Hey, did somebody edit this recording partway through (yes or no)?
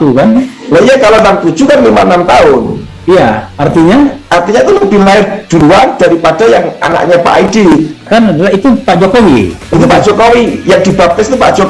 no